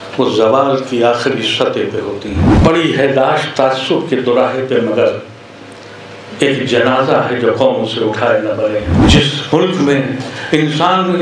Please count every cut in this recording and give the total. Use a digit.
2